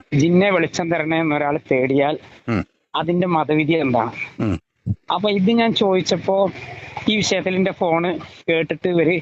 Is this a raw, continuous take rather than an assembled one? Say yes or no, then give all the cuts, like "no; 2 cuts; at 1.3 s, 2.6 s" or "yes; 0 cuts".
yes; 0 cuts